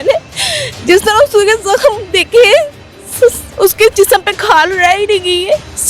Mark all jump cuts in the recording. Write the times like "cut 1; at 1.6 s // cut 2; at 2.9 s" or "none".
none

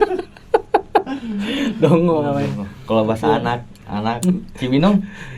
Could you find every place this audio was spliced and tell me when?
none

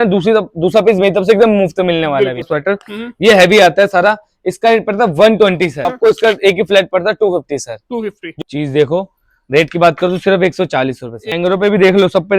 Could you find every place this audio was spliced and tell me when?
cut 1; at 2.5 s // cut 2; at 5.9 s // cut 3; at 8.2 s // cut 4; at 11.3 s

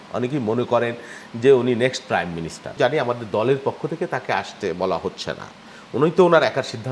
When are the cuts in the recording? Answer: cut 1; at 2.7 s

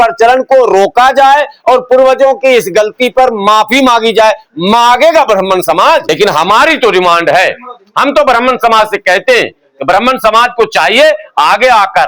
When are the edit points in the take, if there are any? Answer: cut 1; at 6.1 s

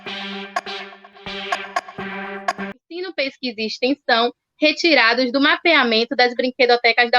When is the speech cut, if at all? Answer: cut 1; at 3.1 s

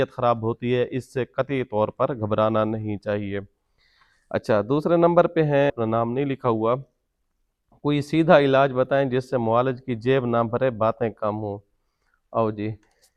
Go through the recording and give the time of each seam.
none

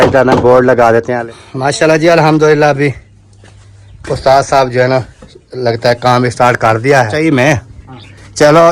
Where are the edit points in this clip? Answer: cut 1; at 1.2 s // cut 2; at 7.1 s

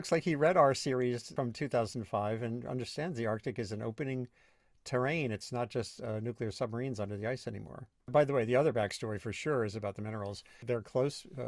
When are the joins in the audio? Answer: cut 1; at 1.3 s // cut 2; at 8.1 s // cut 3; at 10.6 s

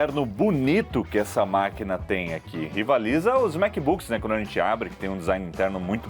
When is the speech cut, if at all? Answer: none

